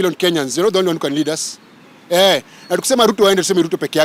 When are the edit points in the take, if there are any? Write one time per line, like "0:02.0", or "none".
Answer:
none